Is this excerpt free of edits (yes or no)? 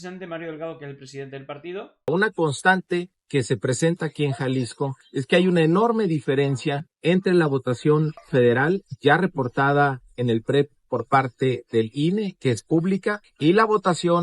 no